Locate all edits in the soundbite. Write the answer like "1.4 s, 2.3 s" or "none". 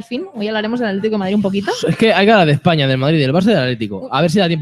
2.9 s